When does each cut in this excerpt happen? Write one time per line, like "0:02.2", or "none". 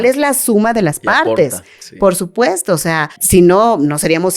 0:03.1